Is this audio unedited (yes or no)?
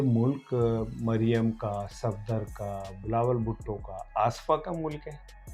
yes